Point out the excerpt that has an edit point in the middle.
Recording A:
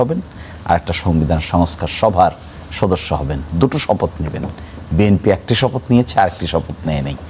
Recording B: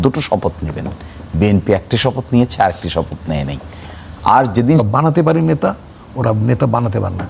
B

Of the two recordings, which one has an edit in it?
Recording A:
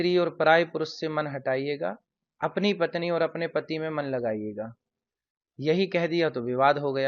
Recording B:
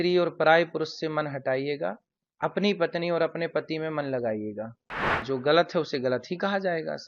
B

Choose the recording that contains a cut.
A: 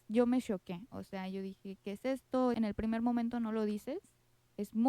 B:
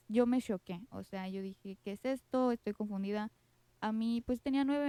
A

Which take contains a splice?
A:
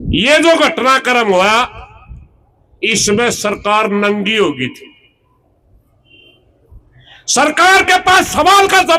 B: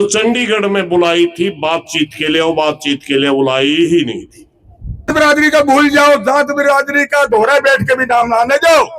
B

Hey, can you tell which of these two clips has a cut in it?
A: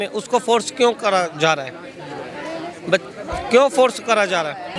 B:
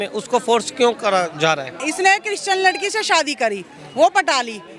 B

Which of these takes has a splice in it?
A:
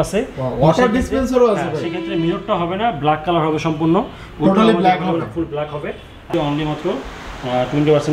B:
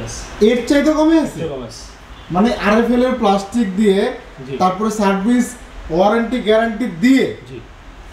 A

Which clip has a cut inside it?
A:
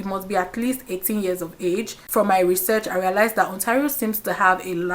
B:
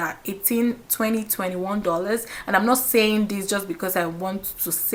A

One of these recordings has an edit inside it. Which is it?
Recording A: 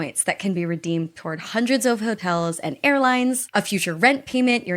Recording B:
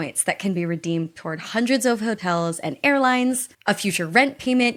A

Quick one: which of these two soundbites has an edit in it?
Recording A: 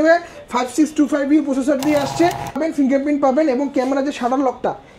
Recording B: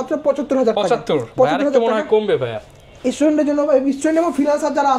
A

